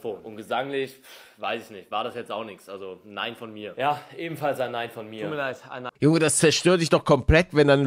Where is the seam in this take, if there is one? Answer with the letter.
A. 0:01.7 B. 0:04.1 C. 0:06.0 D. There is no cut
C